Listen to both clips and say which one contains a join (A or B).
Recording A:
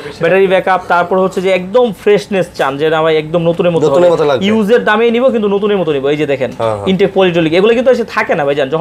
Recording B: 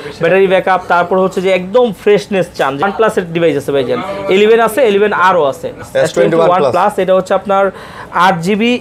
B